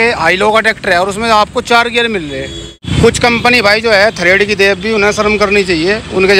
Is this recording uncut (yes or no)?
no